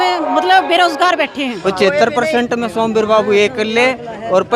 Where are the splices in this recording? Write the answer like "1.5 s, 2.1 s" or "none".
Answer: 1.6 s